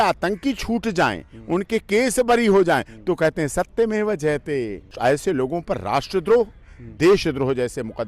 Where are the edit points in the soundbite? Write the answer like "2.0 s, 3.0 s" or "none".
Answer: 4.9 s